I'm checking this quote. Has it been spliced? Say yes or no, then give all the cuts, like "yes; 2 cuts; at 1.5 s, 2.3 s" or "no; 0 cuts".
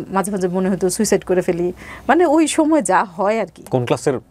no; 0 cuts